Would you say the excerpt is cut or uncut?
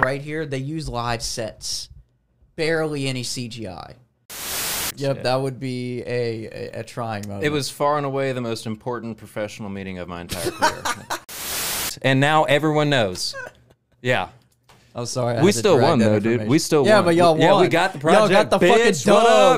cut